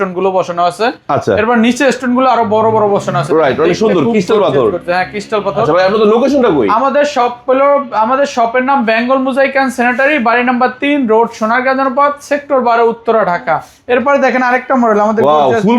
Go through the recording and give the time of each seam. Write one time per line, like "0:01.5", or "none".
none